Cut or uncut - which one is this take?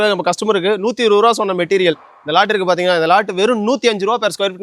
uncut